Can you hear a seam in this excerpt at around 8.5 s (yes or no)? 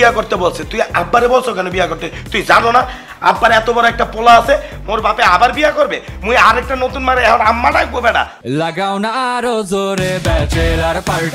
yes